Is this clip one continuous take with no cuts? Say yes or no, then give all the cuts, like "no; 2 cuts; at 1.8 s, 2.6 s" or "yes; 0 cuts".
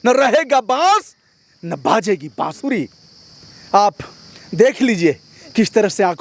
yes; 0 cuts